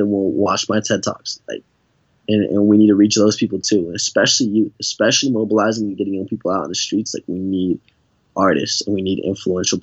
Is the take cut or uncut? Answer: uncut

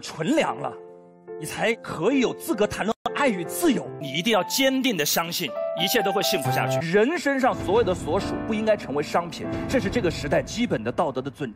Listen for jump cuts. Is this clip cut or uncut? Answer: cut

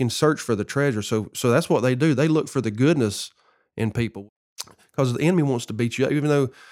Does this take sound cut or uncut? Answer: cut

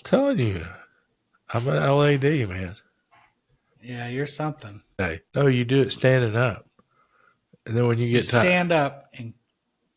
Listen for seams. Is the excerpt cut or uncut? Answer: cut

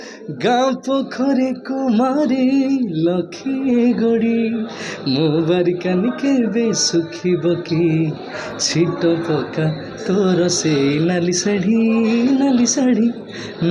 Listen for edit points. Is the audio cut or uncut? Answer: uncut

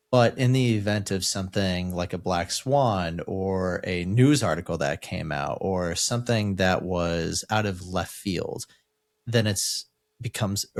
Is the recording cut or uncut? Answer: uncut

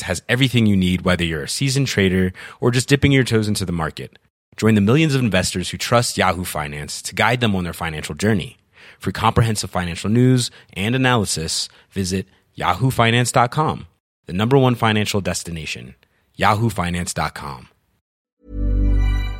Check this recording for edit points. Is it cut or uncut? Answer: cut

